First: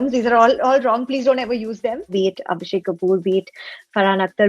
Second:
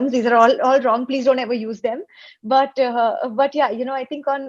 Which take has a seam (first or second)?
first